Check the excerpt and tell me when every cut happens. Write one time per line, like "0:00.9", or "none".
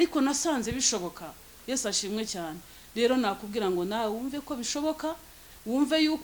none